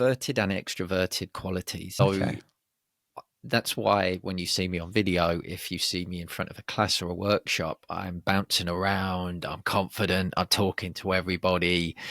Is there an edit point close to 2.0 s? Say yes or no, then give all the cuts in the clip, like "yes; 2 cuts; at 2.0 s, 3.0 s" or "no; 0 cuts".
yes; 1 cut; at 2.0 s